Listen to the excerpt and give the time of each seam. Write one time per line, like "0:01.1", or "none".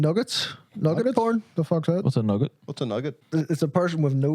0:03.2